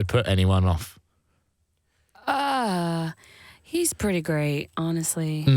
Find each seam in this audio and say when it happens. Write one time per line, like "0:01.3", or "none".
none